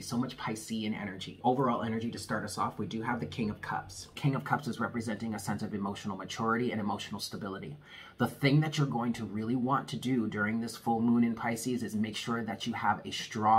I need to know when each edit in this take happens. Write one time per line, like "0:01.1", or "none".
0:01.3
0:04.2